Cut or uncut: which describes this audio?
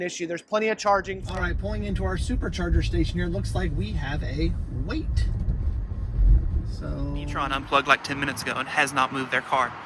cut